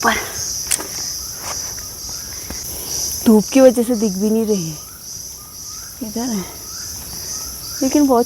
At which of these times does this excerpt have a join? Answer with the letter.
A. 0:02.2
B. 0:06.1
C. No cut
A